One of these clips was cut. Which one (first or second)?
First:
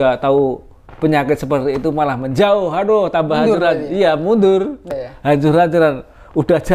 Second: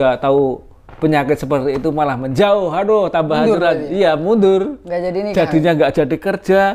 first